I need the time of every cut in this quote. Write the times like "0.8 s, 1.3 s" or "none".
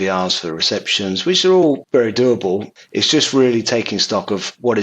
1.8 s, 2.8 s